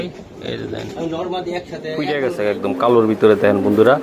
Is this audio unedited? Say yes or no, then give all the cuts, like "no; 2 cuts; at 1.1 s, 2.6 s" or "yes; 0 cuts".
no; 1 cut; at 2.1 s